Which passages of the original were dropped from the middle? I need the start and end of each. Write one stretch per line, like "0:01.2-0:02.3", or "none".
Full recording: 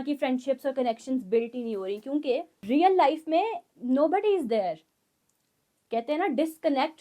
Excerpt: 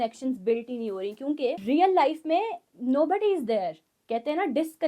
0:02.4-0:02.6
0:04.9-0:05.7